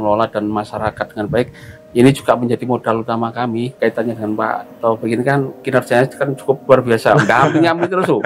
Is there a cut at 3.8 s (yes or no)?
yes